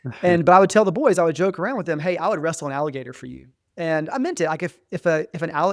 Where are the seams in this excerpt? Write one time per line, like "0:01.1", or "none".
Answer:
none